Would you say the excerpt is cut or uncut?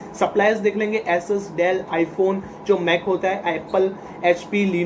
uncut